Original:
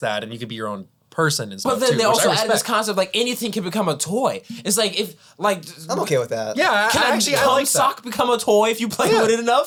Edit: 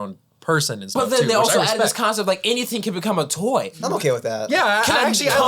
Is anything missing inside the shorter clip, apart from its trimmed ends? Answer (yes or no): yes